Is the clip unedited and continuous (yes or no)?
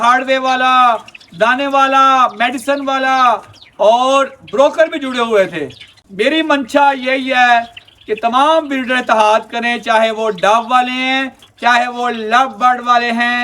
no